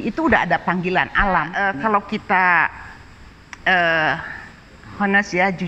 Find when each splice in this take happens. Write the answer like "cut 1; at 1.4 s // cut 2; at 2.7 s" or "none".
cut 1; at 1.5 s